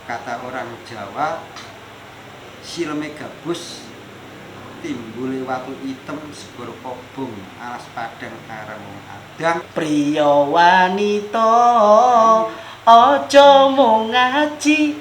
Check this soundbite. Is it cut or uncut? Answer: cut